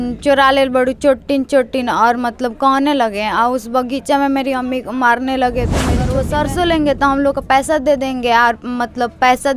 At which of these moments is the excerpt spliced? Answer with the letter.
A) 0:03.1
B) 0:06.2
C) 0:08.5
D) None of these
B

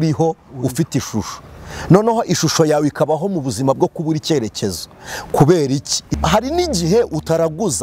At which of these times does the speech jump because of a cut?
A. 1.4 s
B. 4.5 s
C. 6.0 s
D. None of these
C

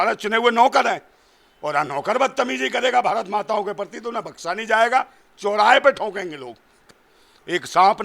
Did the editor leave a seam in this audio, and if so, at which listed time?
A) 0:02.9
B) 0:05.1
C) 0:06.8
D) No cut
C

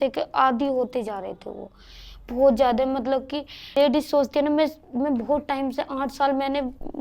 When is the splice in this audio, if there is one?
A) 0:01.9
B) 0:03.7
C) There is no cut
B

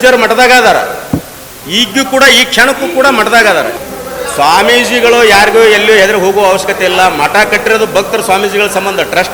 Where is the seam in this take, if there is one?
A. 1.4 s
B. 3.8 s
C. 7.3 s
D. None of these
B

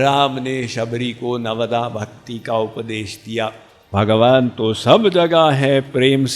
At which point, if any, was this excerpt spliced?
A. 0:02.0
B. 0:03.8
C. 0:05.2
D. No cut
B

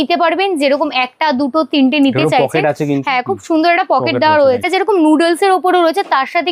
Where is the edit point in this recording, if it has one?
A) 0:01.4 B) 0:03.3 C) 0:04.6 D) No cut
C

